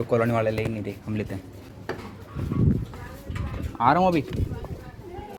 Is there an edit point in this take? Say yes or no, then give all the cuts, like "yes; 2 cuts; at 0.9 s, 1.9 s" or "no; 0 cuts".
no; 0 cuts